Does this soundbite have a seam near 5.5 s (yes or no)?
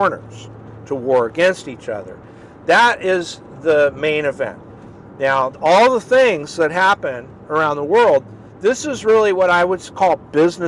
yes